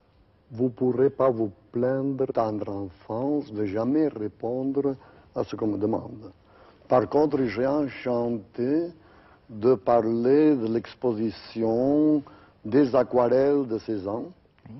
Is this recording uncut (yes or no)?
yes